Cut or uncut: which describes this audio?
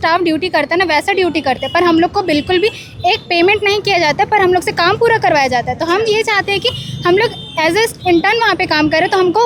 uncut